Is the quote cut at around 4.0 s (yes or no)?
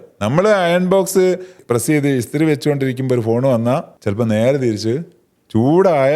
yes